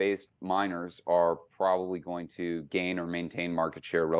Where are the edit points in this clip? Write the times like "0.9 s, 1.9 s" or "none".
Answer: none